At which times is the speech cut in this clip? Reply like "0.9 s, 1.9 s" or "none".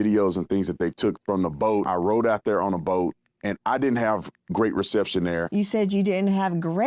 1.9 s, 5.5 s